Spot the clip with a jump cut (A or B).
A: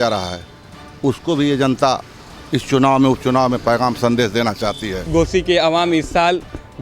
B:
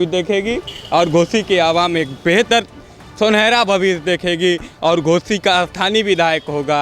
A